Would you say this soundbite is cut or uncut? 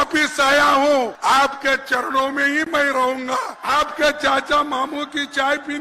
cut